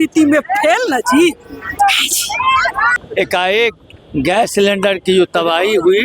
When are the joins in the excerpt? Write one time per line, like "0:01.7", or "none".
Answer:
0:03.0